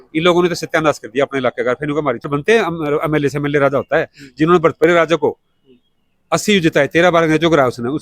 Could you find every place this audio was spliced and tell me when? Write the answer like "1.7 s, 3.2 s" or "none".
none